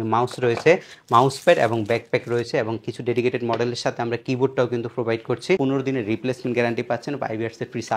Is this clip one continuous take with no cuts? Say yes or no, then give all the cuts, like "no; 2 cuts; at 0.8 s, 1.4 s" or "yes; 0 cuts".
no; 1 cut; at 5.6 s